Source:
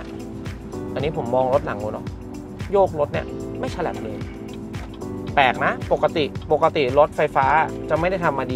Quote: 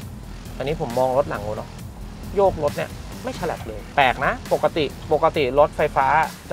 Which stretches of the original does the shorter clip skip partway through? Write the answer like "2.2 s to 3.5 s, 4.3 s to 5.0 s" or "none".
4.2 s to 5.2 s